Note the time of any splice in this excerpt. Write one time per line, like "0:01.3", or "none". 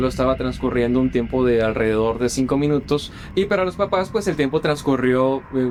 none

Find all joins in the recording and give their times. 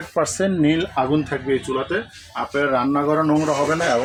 none

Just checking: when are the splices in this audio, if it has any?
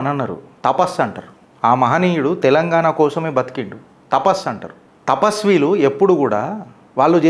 none

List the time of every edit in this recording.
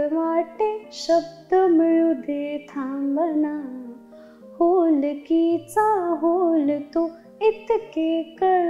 none

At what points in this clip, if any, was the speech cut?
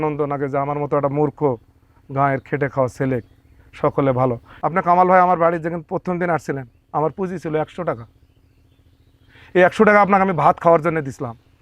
0:04.5

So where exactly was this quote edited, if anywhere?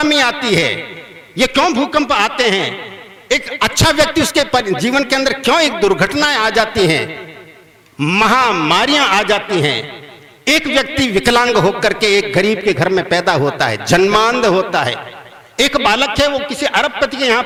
none

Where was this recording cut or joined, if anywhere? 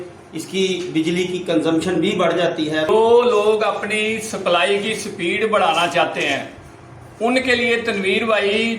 0:02.9

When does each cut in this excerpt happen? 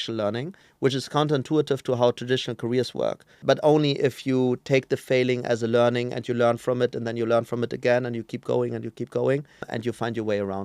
0:03.3
0:09.7

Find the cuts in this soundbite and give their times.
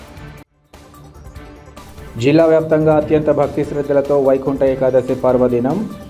0:01.7

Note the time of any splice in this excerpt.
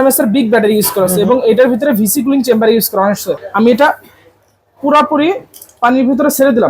0:03.4

